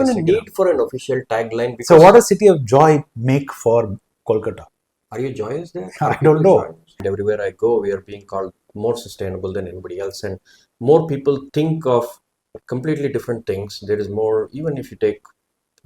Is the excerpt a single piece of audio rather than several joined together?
no; 1 cut; at 7.0 s

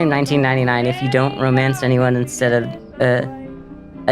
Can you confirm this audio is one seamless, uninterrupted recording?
yes; 0 cuts

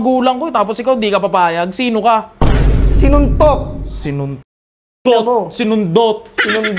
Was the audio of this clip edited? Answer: no; 0 cuts

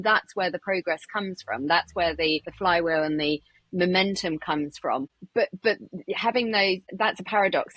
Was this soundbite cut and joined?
yes; 3 cuts; at 2.5 s, 5.2 s, 6.8 s

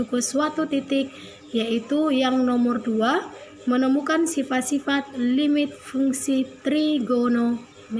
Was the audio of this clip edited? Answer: no; 0 cuts

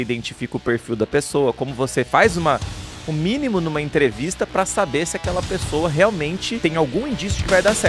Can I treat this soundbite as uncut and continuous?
no; 1 cut; at 6.5 s

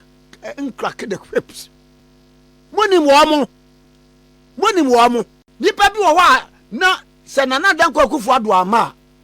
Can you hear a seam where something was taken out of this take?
yes; 1 cut; at 5.4 s

